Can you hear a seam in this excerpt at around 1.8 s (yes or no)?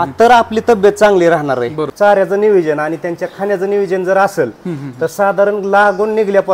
yes